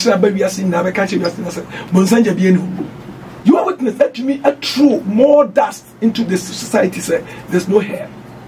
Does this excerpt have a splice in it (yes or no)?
yes